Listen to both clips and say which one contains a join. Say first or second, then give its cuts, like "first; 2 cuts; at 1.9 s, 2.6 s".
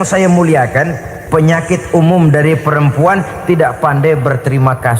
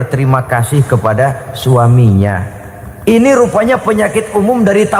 first; 1 cut; at 1.1 s